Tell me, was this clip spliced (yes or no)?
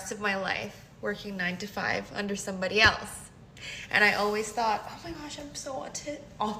no